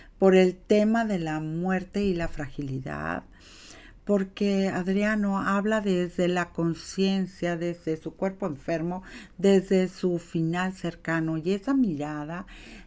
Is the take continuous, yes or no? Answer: yes